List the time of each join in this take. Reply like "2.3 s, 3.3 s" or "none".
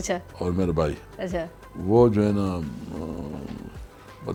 none